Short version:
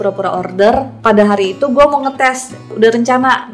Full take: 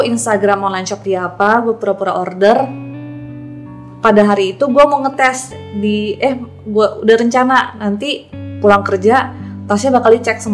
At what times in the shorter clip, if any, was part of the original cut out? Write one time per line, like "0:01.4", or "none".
0:00.9
0:02.7